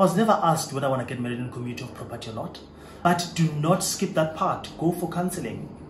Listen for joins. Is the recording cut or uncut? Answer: cut